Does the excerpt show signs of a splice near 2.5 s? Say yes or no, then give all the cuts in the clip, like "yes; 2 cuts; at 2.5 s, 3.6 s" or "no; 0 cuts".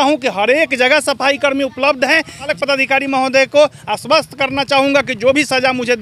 yes; 1 cut; at 2.5 s